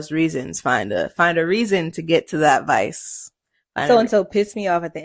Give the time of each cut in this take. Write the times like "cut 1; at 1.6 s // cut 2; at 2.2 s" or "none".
none